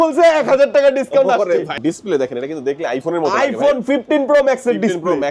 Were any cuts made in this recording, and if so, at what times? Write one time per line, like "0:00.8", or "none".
0:01.8